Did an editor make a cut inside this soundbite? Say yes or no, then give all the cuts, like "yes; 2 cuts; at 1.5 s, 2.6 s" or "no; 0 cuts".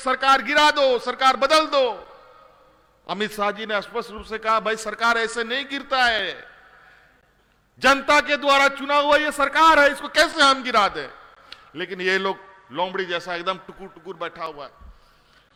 no; 0 cuts